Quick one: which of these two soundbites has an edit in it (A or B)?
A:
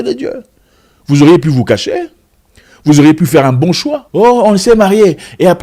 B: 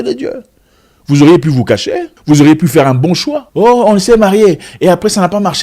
B